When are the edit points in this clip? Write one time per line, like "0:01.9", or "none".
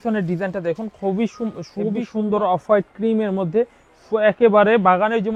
0:02.1